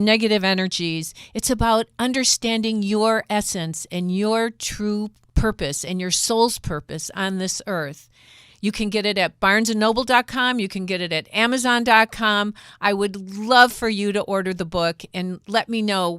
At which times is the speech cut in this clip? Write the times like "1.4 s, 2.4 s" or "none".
5.2 s